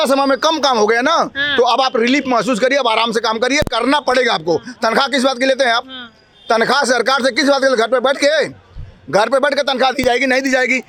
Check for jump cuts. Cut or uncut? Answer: uncut